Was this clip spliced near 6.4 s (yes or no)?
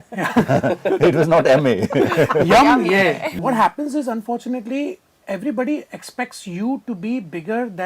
no